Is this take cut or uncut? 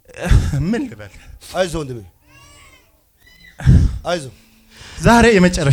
uncut